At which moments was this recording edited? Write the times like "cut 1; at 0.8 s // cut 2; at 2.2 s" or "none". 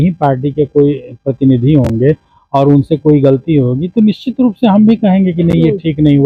none

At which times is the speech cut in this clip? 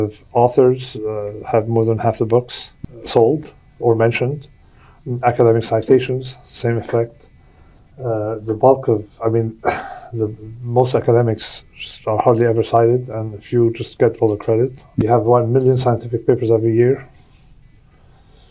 cut 1; at 15.0 s

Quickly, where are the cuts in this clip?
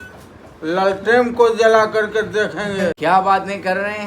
cut 1; at 3.0 s

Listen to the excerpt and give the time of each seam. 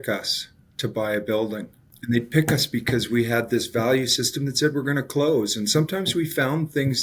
cut 1; at 2.0 s

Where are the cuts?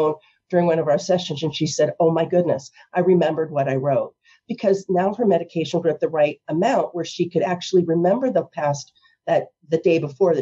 none

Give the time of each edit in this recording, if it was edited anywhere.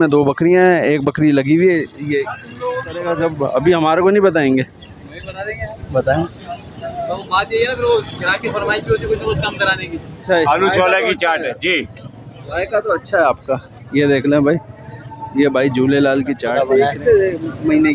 cut 1; at 3.1 s // cut 2; at 10.5 s // cut 3; at 16.5 s

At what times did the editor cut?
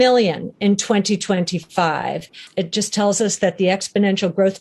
cut 1; at 2.4 s

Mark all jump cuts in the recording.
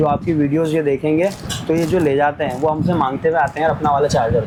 none

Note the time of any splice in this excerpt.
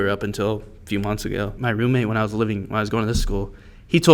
cut 1; at 1.6 s

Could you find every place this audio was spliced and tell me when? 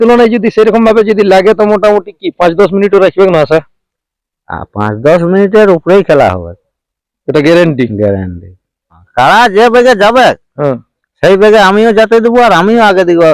cut 1; at 9.0 s

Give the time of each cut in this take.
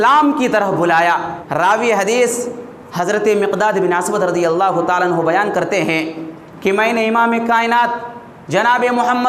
cut 1; at 1.4 s

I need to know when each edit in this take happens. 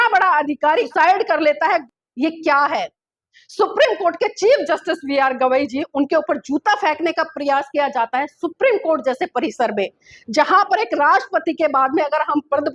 cut 1; at 0.9 s // cut 2; at 1.8 s

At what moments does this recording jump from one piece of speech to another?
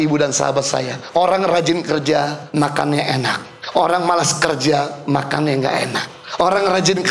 cut 1; at 1.0 s // cut 2; at 2.4 s // cut 3; at 3.5 s // cut 4; at 6.2 s

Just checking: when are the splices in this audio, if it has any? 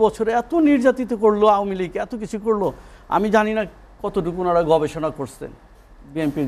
none

